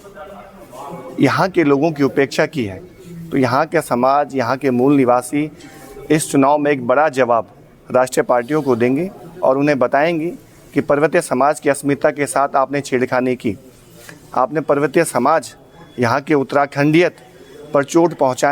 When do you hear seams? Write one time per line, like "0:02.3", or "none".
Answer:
none